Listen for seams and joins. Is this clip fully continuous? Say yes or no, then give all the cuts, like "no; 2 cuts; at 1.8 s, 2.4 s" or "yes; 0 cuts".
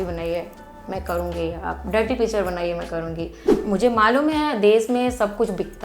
no; 1 cut; at 3.5 s